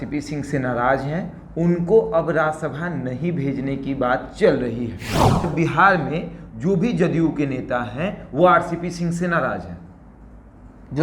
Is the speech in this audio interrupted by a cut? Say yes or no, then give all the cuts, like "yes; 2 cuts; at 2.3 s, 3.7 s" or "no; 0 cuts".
yes; 1 cut; at 5.5 s